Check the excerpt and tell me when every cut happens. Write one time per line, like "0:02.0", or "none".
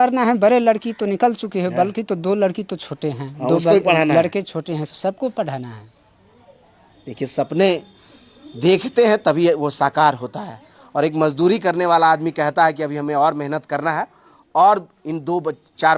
none